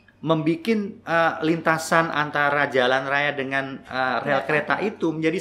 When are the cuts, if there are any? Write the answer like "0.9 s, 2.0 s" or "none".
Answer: none

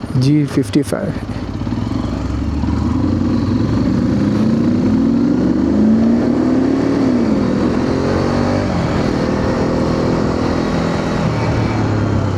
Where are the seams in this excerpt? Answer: none

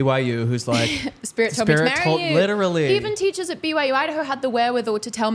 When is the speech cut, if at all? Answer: none

